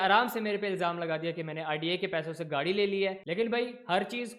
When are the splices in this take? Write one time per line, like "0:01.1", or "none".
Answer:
0:03.2